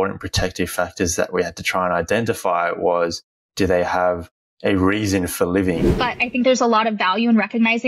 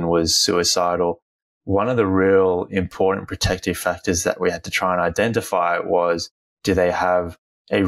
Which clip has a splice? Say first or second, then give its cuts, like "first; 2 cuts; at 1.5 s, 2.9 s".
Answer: first; 1 cut; at 5.9 s